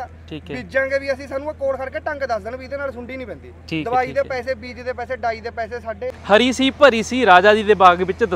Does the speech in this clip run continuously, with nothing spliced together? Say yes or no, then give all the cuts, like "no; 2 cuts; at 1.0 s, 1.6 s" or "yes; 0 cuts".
no; 1 cut; at 6.2 s